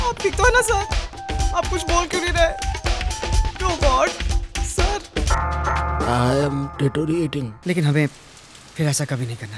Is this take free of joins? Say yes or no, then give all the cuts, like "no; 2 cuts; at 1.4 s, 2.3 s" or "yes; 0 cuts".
no; 1 cut; at 7.5 s